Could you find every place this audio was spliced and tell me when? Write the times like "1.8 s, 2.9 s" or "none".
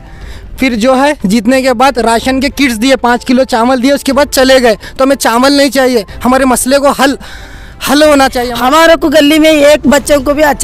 8.4 s